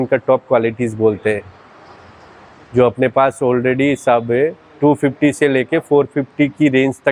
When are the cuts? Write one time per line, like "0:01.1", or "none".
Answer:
none